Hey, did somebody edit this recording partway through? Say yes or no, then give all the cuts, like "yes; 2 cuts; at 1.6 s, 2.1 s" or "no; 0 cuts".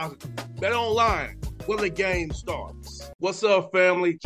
no; 0 cuts